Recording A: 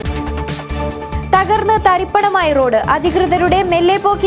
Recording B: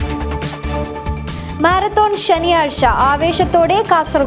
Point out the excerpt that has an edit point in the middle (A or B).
B